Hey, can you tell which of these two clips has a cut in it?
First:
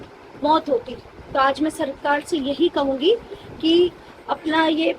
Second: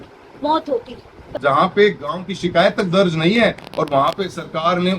second; 1 cut; at 1.2 s

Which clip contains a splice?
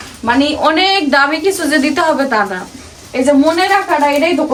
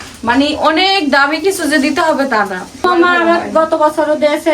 second; 1 cut; at 2.8 s

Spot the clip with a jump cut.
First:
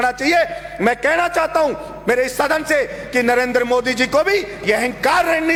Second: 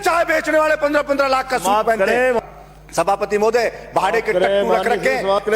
second; 1 cut; at 2.4 s

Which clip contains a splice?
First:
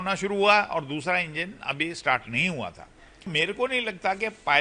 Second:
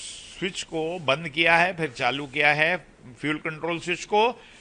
first; 1 cut; at 3.3 s

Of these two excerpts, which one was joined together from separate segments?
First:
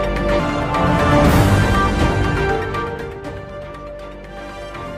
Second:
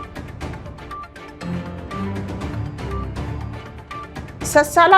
second; 1 cut; at 3.7 s

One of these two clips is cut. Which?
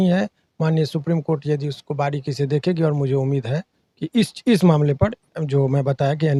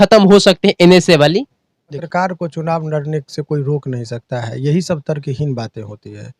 second; 1 cut; at 2.0 s

